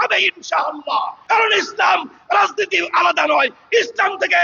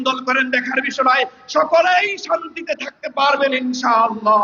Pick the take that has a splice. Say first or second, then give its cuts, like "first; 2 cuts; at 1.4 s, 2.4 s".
first; 1 cut; at 1.2 s